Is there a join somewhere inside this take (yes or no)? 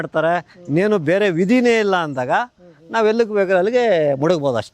no